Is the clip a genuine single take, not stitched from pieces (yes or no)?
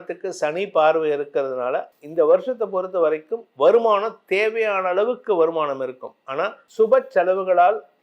no